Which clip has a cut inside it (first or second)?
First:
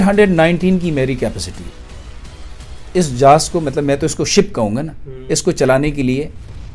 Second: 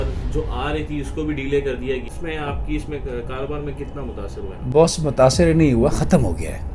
second